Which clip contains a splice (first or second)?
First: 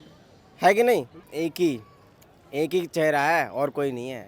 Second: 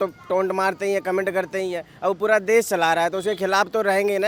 first